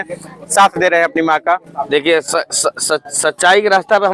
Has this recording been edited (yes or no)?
no